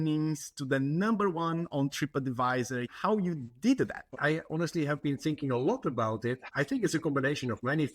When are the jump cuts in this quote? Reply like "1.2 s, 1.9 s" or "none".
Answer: 2.9 s, 4.1 s, 6.5 s